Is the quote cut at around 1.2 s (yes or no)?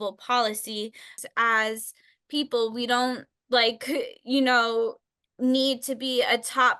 yes